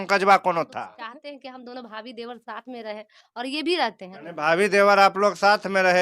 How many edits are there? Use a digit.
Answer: 2